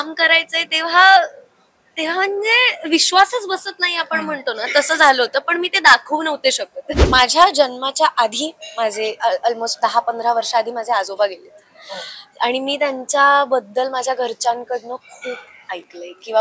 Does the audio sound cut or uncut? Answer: cut